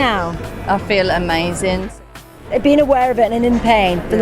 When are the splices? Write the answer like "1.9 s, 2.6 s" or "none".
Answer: 2.1 s